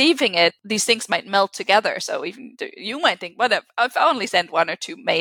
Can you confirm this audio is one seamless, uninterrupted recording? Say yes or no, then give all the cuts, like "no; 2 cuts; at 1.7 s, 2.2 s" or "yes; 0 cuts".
yes; 0 cuts